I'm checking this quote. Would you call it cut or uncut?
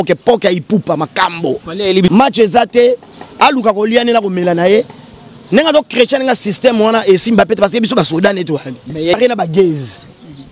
cut